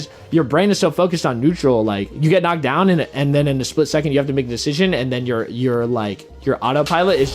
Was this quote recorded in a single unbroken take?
no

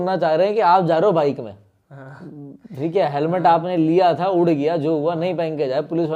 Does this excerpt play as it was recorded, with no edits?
yes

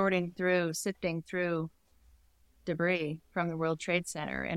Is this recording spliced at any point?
no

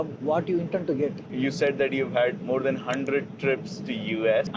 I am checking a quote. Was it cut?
yes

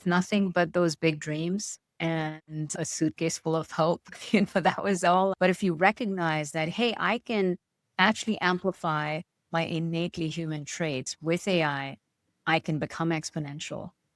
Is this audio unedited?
no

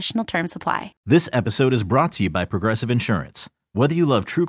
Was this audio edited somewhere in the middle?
yes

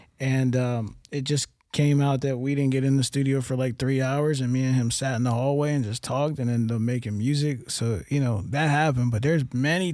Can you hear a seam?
no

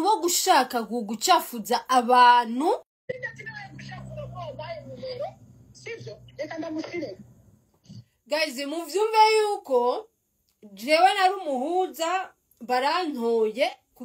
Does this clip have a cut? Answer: yes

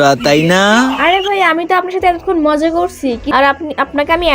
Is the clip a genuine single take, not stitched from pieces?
no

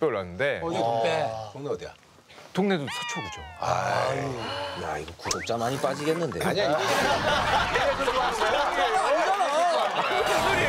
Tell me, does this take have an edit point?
no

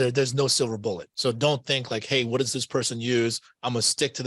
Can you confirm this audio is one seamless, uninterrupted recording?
no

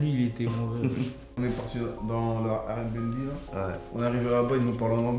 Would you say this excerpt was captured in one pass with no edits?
no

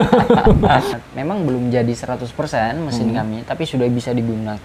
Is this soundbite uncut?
no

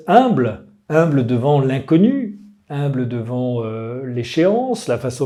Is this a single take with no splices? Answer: yes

